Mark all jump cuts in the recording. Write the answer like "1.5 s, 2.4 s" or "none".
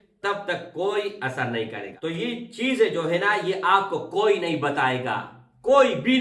1.9 s